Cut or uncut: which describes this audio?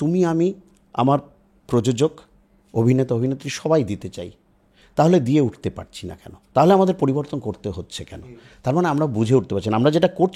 uncut